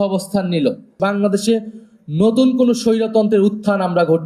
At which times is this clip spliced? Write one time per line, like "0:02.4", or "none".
0:00.9